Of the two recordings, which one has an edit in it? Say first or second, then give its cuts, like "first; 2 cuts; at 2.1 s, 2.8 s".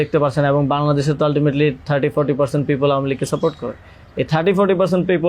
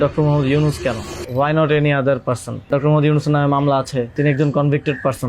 second; 3 cuts; at 1.1 s, 2.7 s, 4.1 s